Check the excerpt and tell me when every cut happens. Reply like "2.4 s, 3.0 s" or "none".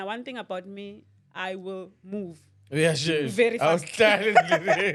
none